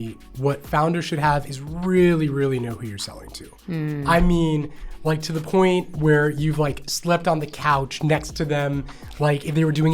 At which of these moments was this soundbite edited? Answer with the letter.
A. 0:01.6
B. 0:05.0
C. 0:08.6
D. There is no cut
A